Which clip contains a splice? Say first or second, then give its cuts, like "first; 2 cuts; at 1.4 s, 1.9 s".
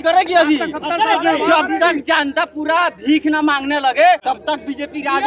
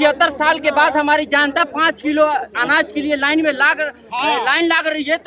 first; 1 cut; at 4.2 s